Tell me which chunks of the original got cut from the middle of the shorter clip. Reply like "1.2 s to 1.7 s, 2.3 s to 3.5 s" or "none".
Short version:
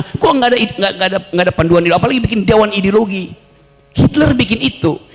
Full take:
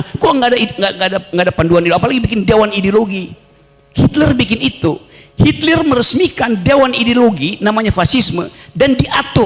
none